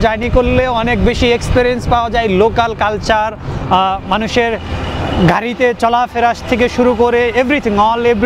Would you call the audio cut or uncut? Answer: uncut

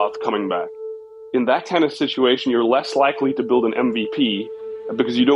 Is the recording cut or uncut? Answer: cut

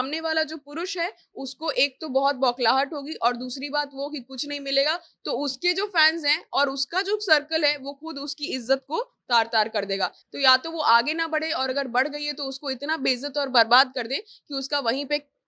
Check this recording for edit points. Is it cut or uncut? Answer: uncut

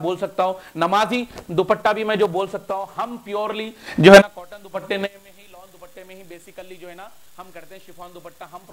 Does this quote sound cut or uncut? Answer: uncut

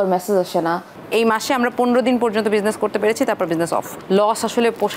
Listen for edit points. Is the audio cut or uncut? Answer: cut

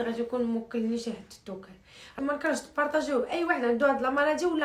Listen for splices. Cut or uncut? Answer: cut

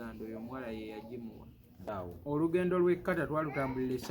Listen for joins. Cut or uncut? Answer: cut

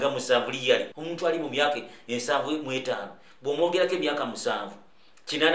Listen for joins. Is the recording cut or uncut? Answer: cut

